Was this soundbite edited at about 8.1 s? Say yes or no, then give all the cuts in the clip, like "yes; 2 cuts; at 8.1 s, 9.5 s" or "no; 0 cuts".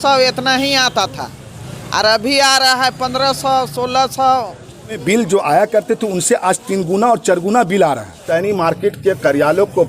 yes; 2 cuts; at 5.0 s, 8.1 s